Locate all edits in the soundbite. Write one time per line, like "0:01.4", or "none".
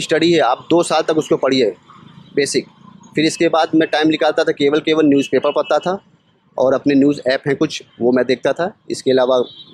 none